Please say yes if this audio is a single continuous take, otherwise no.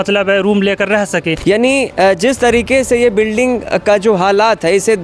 no